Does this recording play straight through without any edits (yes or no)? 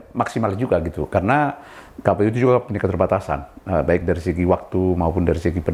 yes